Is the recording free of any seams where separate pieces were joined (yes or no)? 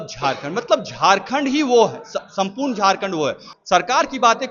no